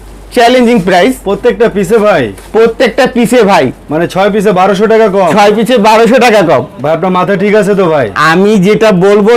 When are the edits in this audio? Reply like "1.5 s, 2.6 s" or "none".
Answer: none